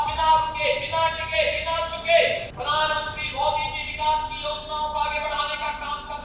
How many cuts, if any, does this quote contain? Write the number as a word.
one